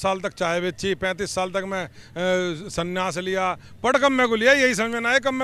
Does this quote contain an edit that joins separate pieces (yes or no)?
no